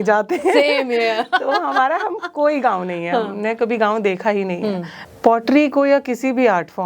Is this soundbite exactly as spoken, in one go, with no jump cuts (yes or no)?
no